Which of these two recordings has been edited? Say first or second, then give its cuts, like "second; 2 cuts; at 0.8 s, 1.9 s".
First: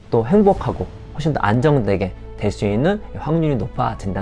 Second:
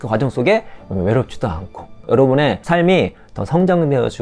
second; 2 cuts; at 2.0 s, 2.6 s